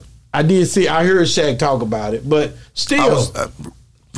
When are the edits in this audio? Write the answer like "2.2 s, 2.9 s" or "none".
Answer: none